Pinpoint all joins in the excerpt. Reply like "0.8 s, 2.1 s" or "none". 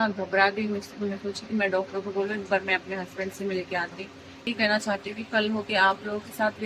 4.5 s